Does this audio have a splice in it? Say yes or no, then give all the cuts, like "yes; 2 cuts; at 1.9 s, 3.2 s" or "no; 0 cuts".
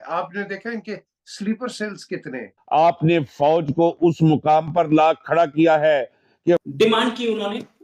yes; 1 cut; at 6.6 s